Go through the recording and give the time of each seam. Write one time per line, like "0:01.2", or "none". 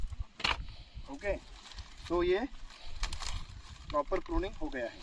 none